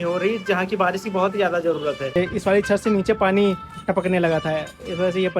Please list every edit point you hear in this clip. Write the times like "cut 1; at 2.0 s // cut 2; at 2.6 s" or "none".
cut 1; at 2.1 s